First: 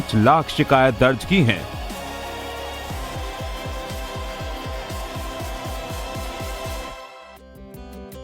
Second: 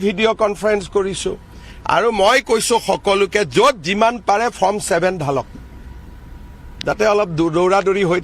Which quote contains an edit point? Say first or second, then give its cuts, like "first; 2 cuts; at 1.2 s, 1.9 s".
first; 1 cut; at 1.2 s